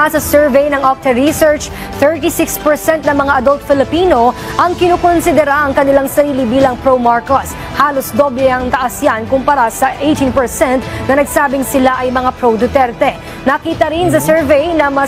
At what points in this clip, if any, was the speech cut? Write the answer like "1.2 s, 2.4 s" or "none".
none